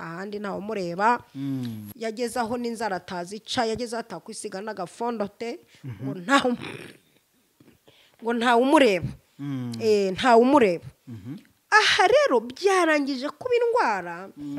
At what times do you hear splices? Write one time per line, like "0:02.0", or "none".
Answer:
none